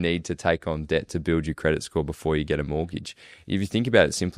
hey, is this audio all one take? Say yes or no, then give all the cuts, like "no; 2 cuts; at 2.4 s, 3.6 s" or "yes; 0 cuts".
yes; 0 cuts